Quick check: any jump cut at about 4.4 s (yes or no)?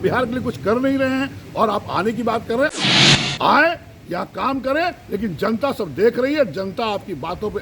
no